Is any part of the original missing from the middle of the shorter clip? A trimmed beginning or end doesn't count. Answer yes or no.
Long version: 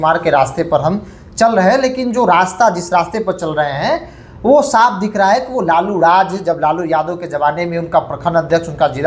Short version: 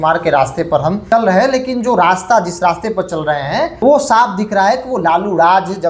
yes